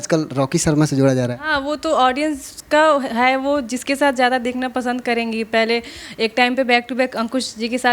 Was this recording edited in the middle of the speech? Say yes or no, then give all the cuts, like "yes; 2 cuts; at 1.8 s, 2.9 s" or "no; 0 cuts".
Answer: no; 0 cuts